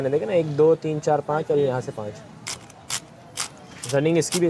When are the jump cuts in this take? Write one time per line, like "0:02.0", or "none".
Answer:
0:02.5